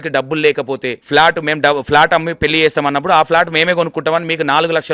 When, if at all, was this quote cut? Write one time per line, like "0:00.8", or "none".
0:00.9